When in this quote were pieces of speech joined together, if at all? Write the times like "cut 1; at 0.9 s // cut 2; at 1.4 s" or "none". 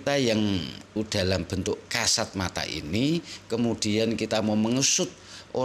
none

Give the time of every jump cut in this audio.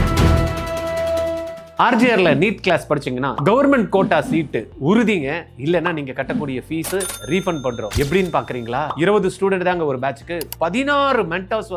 cut 1; at 1.6 s

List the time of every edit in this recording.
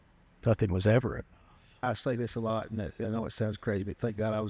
cut 1; at 1.7 s

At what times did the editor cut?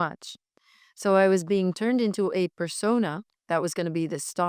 cut 1; at 3.3 s

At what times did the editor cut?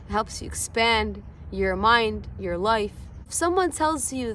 cut 1; at 3.2 s

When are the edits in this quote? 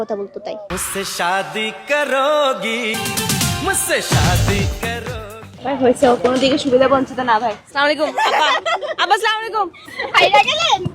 cut 1; at 2.9 s // cut 2; at 9.9 s

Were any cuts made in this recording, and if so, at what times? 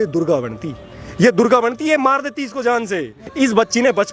cut 1; at 3.2 s

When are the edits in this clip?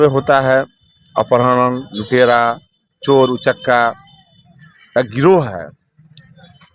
none

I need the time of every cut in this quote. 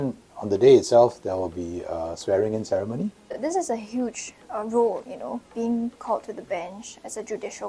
cut 1; at 3.4 s

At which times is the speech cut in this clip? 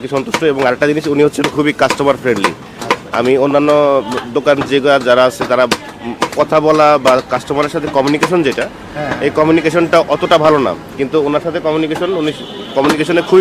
none

